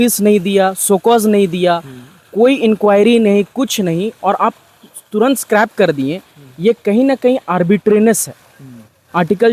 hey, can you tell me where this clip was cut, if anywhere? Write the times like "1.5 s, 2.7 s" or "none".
none